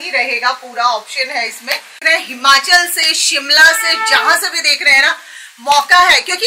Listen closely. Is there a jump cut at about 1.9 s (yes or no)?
yes